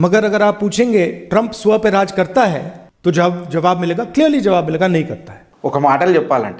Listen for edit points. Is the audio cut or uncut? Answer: cut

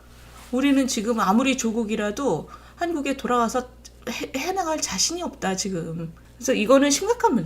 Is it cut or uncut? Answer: cut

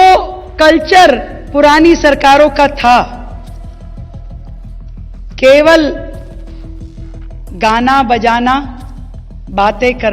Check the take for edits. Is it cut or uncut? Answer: cut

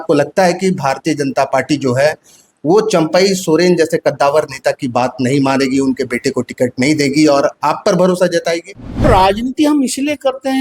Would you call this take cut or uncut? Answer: cut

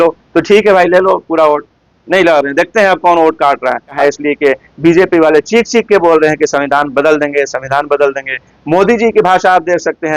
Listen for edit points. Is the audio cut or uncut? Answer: cut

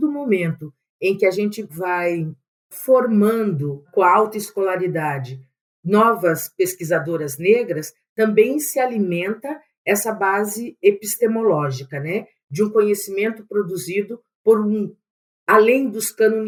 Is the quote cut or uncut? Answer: uncut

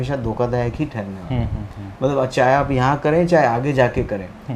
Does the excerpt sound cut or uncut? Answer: uncut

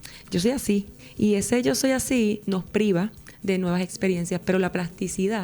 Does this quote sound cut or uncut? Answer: cut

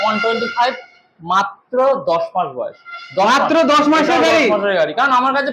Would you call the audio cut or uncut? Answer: uncut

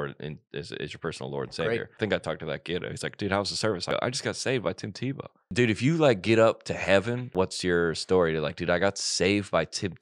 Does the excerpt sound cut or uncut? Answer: cut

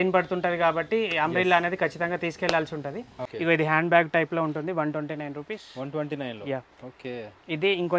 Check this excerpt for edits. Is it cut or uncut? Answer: cut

